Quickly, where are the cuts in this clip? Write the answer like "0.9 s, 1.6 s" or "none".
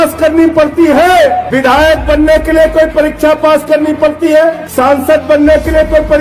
1.5 s, 4.6 s